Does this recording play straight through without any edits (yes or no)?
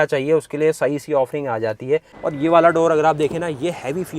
no